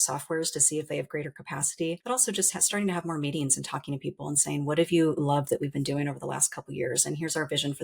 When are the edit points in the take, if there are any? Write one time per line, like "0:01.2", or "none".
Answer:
0:02.0